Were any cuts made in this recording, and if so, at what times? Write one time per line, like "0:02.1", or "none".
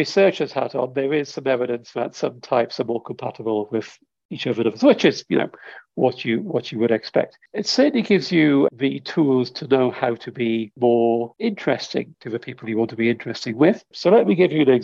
0:07.4
0:08.7
0:10.7
0:11.3
0:12.2
0:13.9

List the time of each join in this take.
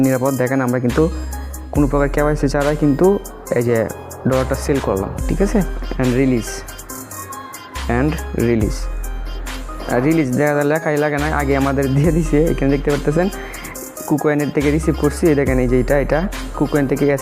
0:05.8

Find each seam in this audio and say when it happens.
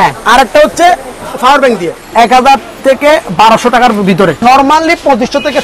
0:01.9
0:04.4

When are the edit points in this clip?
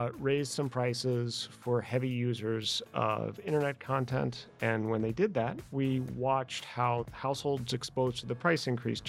none

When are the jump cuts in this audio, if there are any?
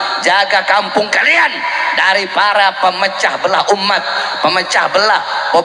none

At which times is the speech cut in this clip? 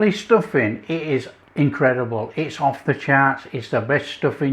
none

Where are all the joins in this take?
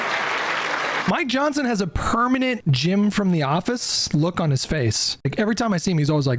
0:01.0
0:02.6
0:05.1

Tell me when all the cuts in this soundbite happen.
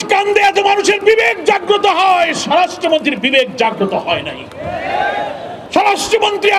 0:05.6

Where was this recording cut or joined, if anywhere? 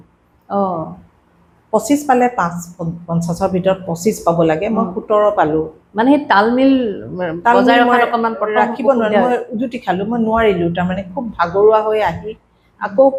none

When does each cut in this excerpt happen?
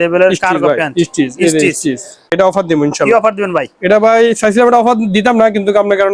0:02.3

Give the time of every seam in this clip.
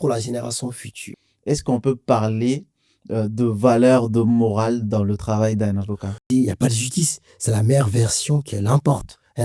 0:01.1
0:06.2

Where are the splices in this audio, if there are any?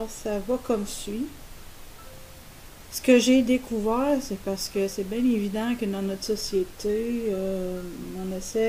0:00.9

